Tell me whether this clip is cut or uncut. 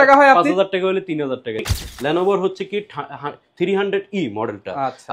cut